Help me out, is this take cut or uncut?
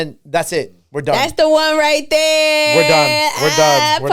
uncut